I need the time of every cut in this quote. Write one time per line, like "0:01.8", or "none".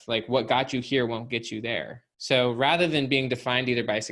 none